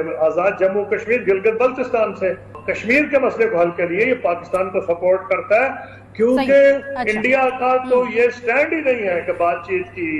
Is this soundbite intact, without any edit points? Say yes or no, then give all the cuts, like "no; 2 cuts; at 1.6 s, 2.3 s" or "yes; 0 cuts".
no; 1 cut; at 2.5 s